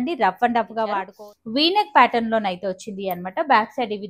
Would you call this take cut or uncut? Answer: cut